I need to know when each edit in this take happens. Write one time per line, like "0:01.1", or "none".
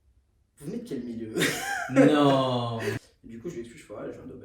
0:03.1

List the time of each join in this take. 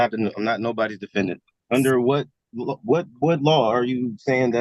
0:01.5

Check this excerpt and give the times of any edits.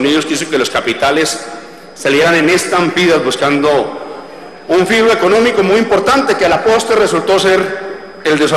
0:04.5

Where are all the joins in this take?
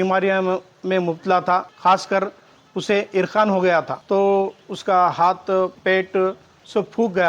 0:01.7
0:04.0
0:05.8

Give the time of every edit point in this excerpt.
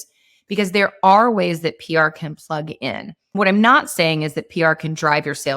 0:03.4

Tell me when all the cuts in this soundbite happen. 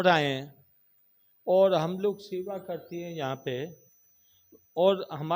none

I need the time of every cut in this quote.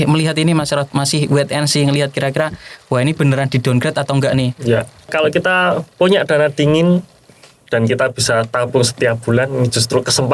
0:05.1

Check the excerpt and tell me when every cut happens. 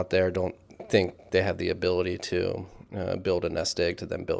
none

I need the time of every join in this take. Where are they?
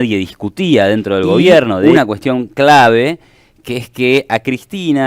0:01.8

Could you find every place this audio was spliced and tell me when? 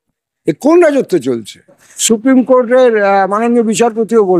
0:01.9

